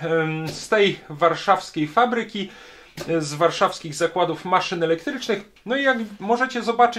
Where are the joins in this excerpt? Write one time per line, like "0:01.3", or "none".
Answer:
0:05.5